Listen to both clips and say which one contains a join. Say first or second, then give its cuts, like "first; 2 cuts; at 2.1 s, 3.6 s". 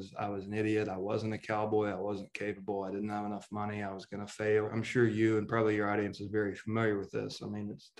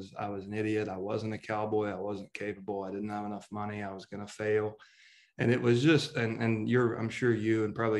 first; 1 cut; at 4.8 s